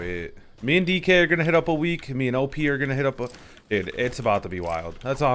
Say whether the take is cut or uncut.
uncut